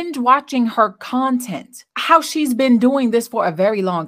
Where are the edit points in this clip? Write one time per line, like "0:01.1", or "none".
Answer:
0:01.9